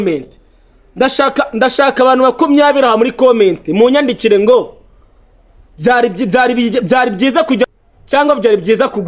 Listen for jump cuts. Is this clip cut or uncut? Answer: cut